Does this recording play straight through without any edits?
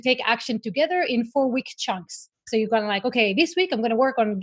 yes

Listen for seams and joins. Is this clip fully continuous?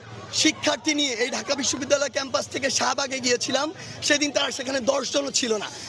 yes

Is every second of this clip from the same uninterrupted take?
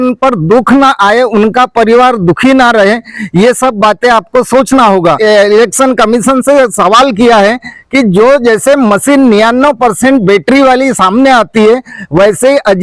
no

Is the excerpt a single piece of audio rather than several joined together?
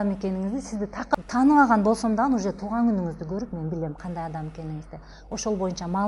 no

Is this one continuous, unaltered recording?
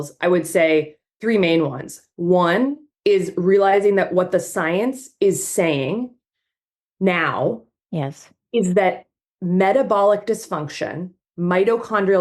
no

